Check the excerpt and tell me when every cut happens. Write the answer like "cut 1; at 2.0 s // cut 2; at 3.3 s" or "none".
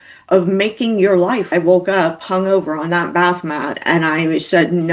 cut 1; at 1.5 s